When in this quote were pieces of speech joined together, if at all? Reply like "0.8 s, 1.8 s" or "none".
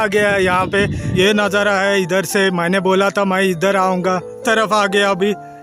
1.0 s, 4.4 s